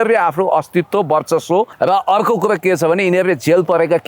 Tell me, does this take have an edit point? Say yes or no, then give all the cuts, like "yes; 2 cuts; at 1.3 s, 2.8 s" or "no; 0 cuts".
yes; 1 cut; at 1.7 s